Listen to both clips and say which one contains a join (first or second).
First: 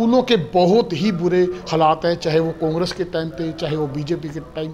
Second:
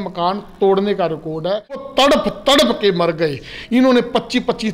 second